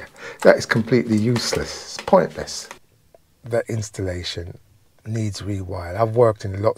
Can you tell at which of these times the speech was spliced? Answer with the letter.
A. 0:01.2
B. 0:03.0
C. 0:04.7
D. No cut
B